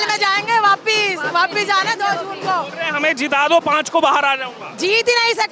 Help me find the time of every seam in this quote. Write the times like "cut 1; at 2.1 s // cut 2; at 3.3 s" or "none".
none